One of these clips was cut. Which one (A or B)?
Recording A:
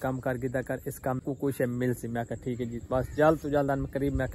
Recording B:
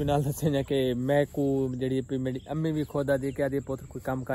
A